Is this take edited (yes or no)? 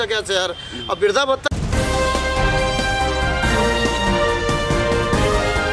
no